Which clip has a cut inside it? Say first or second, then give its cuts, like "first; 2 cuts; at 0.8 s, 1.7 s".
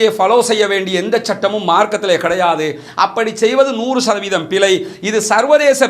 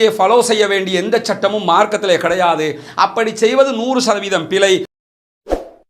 second; 1 cut; at 4.9 s